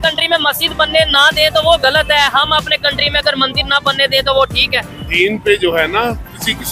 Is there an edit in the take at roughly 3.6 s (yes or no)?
no